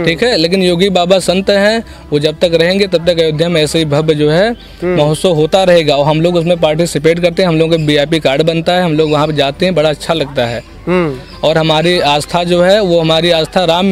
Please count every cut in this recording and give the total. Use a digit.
0